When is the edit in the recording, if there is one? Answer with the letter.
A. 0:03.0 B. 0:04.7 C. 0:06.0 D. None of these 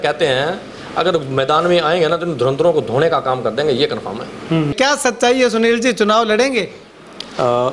B